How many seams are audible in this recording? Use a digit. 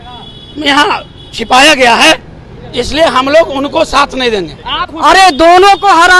1